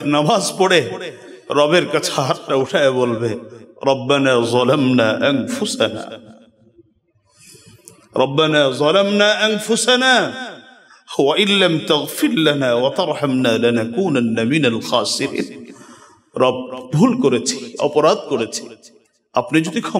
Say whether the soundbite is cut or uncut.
uncut